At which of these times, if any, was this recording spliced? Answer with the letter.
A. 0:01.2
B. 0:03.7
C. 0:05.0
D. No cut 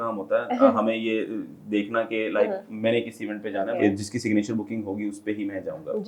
B